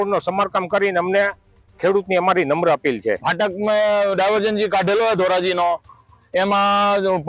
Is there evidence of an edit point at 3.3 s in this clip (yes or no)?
yes